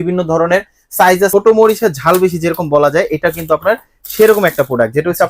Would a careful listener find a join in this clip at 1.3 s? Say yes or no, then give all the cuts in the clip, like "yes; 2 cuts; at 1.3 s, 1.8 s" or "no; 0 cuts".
yes; 1 cut; at 1.3 s